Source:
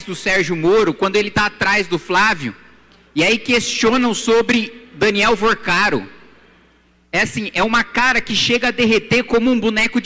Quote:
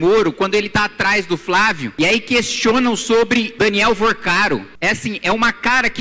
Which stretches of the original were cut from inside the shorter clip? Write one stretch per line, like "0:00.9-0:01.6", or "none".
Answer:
0:02.5-0:03.0
0:04.7-0:04.9
0:06.1-0:07.0